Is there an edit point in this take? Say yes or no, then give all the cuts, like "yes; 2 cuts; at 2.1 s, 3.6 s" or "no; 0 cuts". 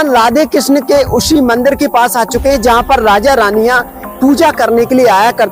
no; 0 cuts